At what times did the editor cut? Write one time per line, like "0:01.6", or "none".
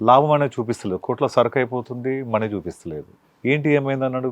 0:03.3

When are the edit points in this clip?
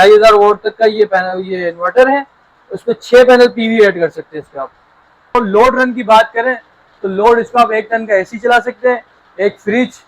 0:05.4

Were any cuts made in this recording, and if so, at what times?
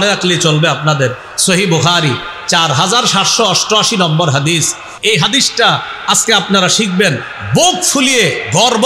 0:04.8

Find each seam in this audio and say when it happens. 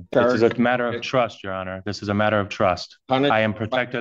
none

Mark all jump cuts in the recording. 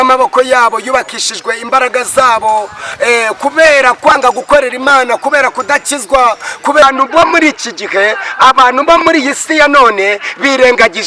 0:06.8

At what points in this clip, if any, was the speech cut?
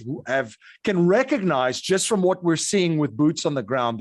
none

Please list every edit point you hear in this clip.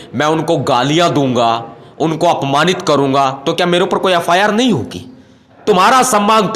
0:05.5

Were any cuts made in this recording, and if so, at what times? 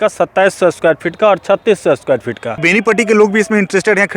0:02.6

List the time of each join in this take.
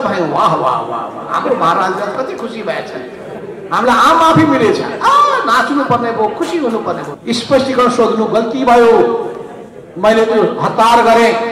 0:07.1

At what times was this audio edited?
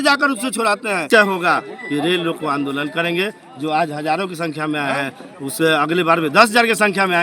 0:01.1

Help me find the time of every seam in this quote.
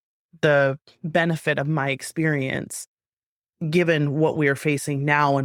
none

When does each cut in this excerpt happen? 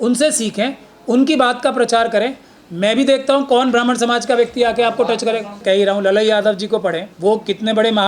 0:05.6
0:07.1

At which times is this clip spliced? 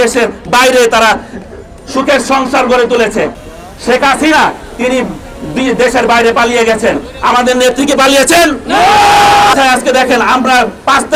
0:03.4
0:09.5

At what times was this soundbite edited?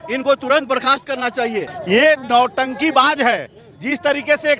0:01.8

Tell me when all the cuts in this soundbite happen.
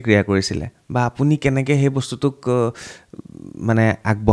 none

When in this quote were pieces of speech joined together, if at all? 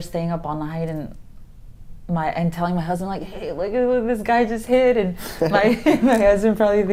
none

